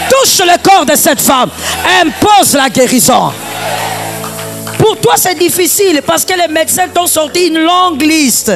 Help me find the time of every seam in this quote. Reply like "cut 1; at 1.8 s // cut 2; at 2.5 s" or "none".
none